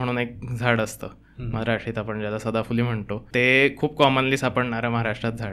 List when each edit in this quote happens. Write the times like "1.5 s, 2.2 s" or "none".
3.2 s